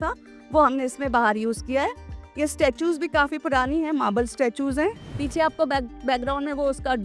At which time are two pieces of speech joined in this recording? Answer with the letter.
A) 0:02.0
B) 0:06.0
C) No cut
C